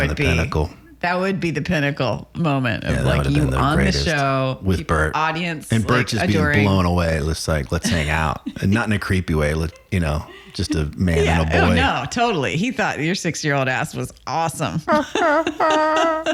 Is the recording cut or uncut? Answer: uncut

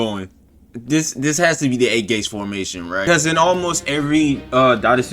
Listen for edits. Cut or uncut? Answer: cut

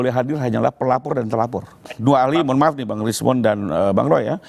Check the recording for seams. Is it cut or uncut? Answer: cut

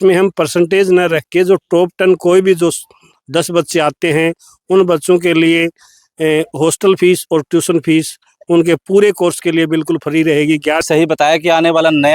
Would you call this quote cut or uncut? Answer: cut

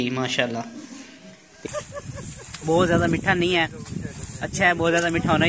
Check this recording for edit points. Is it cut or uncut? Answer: cut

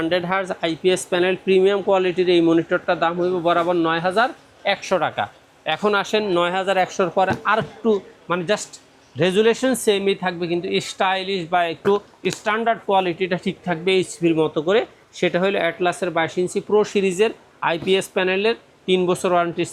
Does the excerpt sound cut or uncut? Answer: uncut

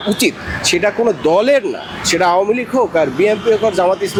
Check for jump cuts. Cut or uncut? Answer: uncut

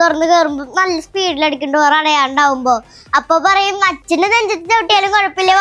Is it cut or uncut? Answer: cut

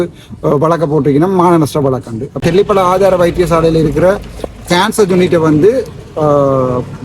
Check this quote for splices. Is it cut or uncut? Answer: cut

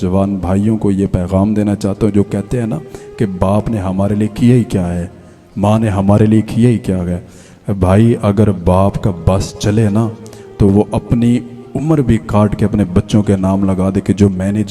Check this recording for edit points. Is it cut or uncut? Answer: uncut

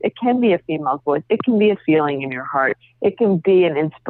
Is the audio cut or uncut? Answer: uncut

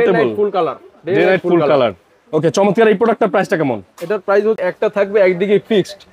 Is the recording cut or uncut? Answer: cut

